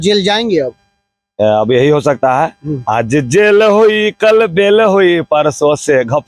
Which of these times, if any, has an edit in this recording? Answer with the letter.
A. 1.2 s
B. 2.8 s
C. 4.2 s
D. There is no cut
D